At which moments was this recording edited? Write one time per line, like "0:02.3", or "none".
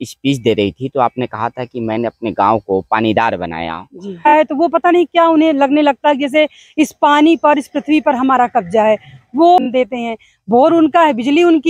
0:04.3
0:09.6

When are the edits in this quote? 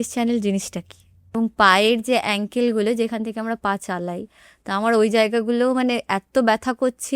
0:01.3

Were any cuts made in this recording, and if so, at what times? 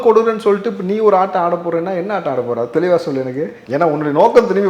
0:03.6

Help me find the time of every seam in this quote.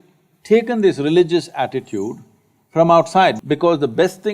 0:03.4

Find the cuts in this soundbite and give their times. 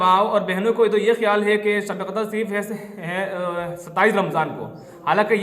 none

